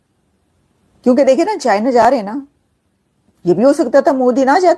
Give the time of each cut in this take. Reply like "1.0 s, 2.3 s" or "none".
none

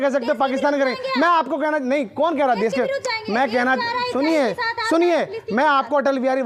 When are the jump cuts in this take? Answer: none

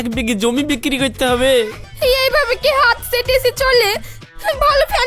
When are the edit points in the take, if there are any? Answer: 1.8 s

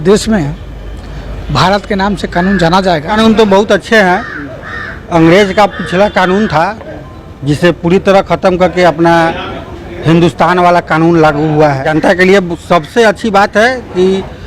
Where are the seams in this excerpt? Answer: 3.1 s, 11.9 s

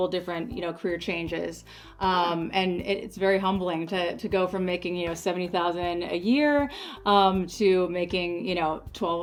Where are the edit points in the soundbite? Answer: none

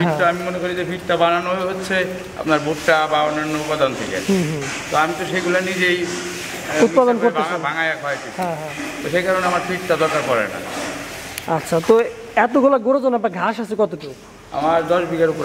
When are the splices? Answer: none

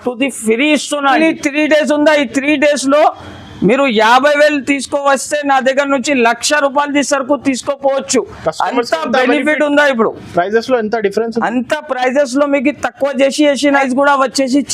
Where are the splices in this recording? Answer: 1.2 s, 13.8 s

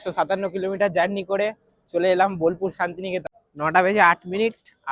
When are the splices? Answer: 3.3 s

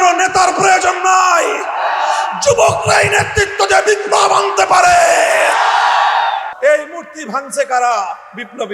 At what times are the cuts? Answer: 6.5 s

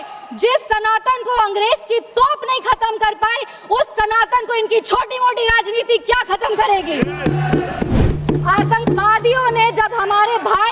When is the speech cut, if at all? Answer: 8.0 s

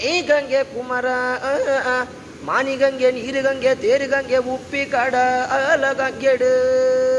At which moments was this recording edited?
none

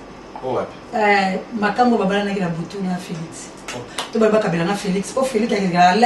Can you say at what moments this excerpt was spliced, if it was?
3.9 s

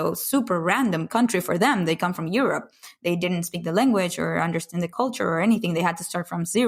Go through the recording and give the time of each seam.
4.9 s

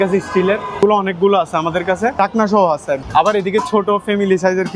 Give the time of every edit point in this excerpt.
0.8 s, 2.1 s, 3.0 s

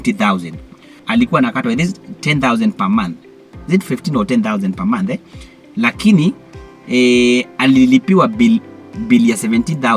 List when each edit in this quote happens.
1.0 s

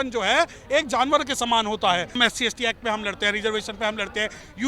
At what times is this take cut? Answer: 2.2 s

